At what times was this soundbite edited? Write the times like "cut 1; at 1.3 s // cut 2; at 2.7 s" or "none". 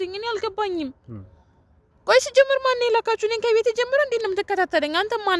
none